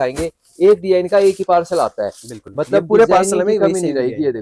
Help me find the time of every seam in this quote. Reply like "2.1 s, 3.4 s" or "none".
none